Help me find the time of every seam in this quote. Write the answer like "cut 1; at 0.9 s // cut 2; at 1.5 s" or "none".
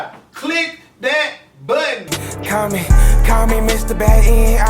cut 1; at 2.2 s